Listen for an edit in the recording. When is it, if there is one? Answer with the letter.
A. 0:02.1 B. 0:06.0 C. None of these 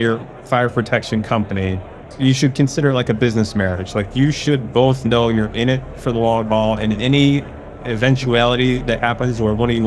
A